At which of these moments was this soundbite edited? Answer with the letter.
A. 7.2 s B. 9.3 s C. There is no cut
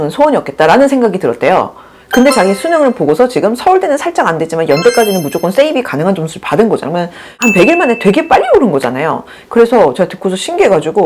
B